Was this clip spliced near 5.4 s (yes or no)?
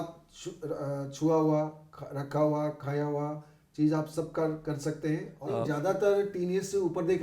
yes